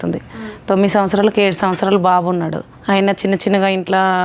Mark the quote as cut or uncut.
cut